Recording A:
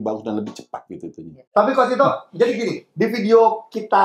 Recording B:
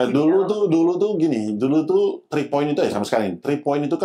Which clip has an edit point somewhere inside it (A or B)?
A